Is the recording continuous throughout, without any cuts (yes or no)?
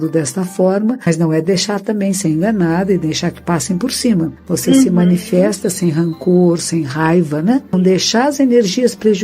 no